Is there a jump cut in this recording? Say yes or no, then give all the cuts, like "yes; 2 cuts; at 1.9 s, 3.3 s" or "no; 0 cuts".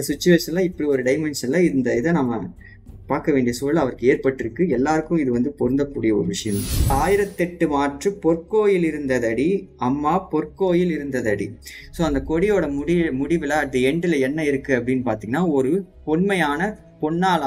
yes; 1 cut; at 6.9 s